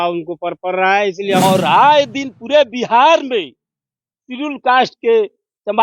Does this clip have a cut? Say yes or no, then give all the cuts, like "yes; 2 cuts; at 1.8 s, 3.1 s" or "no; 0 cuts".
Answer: yes; 1 cut; at 1.4 s